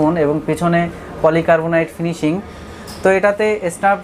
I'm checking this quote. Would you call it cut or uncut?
uncut